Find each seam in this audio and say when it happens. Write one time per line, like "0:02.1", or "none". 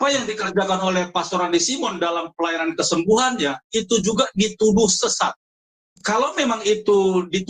none